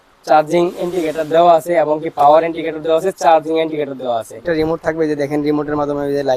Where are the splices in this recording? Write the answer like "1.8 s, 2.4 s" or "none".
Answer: 4.4 s